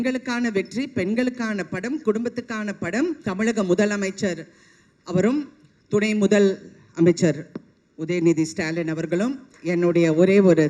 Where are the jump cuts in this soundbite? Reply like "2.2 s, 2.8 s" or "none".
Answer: 3.2 s, 9.5 s